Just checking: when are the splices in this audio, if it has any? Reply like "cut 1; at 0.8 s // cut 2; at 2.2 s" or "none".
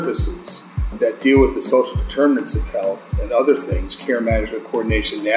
none